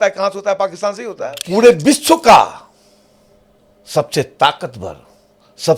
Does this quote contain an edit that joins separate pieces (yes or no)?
yes